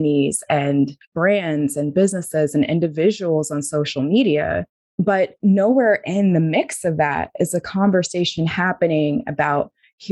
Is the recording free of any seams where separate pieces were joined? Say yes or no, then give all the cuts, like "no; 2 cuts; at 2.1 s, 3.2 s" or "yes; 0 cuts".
no; 1 cut; at 1.0 s